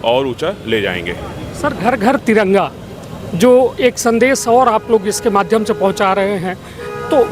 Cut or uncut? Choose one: uncut